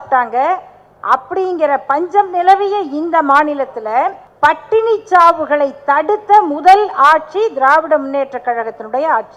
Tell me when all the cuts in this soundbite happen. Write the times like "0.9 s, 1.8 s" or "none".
4.2 s